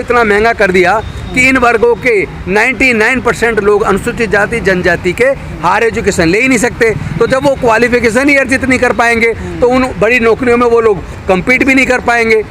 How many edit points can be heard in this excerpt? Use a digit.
0